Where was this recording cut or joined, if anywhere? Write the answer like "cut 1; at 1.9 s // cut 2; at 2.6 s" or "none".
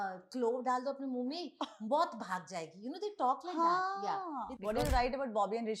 cut 1; at 4.5 s